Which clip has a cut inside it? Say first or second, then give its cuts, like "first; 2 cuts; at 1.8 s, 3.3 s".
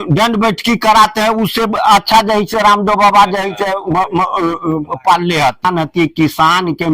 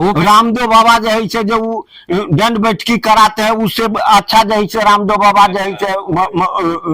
first; 1 cut; at 5.7 s